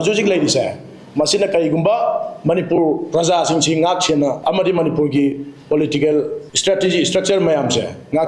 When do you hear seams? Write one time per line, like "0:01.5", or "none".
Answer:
0:04.4
0:06.4